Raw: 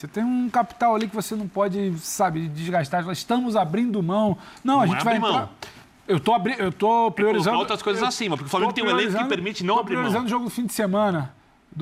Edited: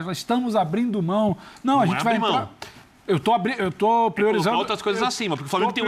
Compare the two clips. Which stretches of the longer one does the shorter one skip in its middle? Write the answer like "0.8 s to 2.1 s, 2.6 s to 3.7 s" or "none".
none